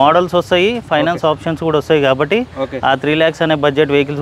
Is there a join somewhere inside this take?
no; 0 cuts

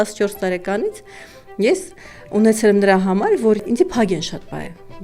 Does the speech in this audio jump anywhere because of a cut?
yes; 1 cut; at 3.6 s

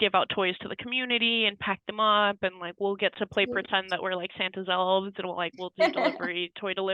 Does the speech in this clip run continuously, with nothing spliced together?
yes; 0 cuts

